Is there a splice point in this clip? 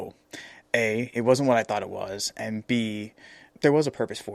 no; 0 cuts

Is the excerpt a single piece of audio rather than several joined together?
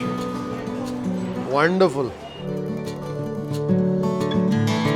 yes; 0 cuts

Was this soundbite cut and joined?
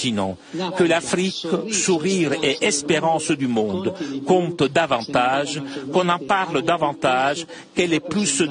no; 0 cuts

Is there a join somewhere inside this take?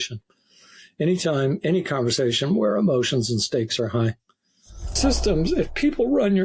yes; 1 cut; at 4.9 s

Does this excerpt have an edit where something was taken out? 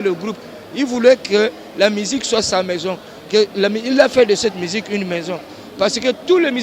no; 0 cuts

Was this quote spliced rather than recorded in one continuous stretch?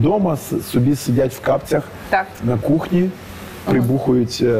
no; 0 cuts

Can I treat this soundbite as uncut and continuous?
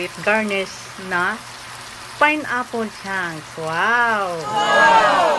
no; 1 cut; at 4.5 s

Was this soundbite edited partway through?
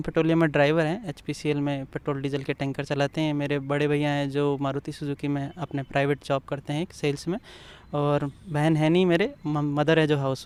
no; 0 cuts

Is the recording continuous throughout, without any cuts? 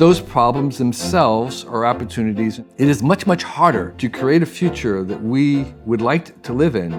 yes; 0 cuts

